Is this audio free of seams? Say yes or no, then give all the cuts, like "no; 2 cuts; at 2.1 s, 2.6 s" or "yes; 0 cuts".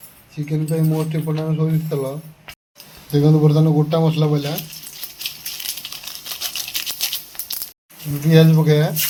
yes; 0 cuts